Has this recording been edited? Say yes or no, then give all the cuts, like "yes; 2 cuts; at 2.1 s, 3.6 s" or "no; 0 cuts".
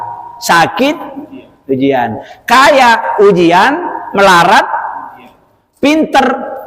no; 0 cuts